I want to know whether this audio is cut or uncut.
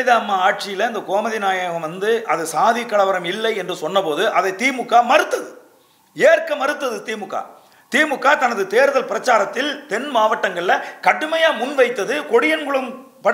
uncut